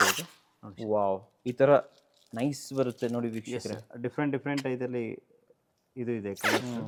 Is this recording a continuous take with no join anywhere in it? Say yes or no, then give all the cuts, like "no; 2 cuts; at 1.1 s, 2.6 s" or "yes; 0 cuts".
yes; 0 cuts